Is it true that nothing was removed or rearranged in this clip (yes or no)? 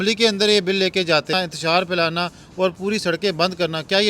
no